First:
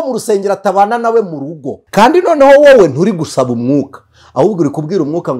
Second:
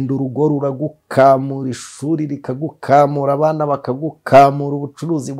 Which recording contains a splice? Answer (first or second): first